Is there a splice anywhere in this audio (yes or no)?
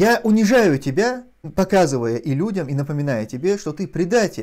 yes